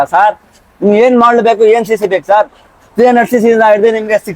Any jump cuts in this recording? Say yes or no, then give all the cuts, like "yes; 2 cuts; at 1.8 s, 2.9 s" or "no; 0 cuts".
no; 0 cuts